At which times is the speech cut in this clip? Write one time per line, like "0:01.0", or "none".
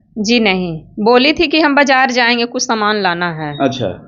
none